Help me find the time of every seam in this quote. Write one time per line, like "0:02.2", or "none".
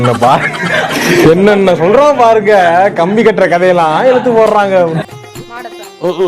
0:05.1